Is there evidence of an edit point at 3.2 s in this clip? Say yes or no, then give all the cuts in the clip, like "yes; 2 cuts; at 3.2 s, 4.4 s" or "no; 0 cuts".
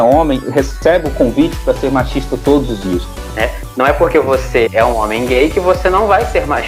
yes; 1 cut; at 3.2 s